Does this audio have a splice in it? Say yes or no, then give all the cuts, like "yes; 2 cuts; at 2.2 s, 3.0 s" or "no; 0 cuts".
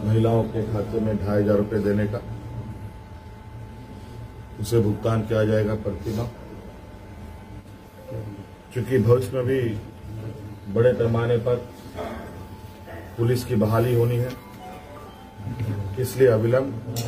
yes; 2 cuts; at 7.7 s, 15.6 s